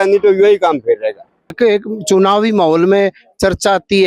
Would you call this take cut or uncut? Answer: cut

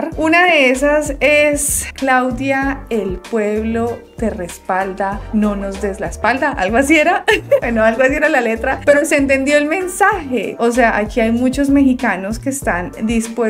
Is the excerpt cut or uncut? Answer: uncut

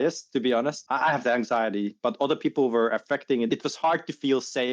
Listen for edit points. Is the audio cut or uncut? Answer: cut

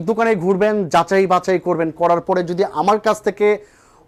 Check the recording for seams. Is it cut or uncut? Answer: uncut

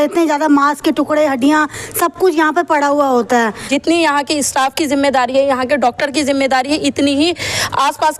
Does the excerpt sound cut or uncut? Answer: cut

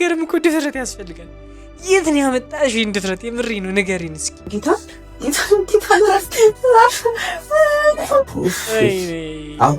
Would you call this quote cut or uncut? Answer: cut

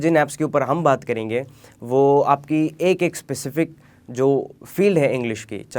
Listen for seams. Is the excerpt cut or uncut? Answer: uncut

